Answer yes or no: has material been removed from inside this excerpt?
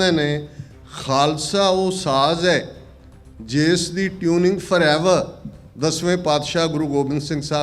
no